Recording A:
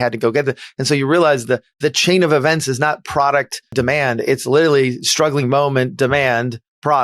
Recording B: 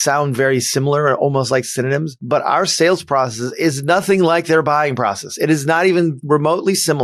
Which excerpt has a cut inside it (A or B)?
A